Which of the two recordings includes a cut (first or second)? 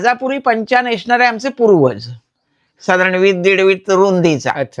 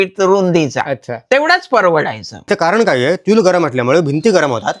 second